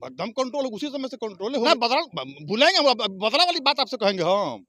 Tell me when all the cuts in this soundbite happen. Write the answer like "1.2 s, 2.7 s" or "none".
1.7 s